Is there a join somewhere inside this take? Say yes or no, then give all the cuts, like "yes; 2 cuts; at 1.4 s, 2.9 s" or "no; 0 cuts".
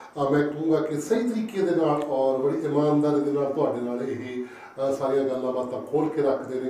no; 0 cuts